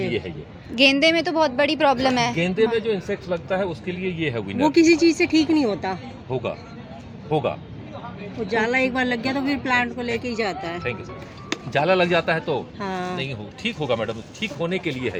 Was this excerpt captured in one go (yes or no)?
yes